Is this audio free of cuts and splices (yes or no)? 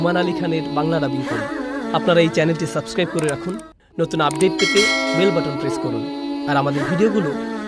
yes